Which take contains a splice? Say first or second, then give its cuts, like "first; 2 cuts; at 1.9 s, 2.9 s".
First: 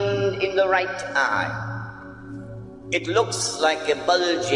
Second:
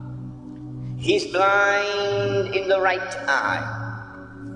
second; 1 cut; at 1.1 s